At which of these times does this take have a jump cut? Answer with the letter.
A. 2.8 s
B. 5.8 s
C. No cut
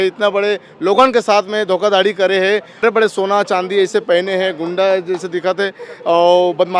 A